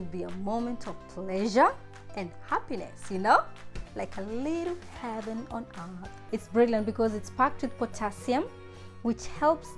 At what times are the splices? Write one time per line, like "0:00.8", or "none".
0:06.1